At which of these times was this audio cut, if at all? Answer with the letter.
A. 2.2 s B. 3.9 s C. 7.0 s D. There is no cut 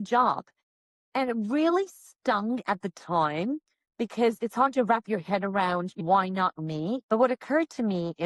C